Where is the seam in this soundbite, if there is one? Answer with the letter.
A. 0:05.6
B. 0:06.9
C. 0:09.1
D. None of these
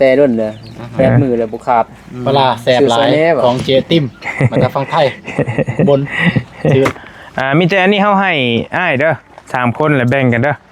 B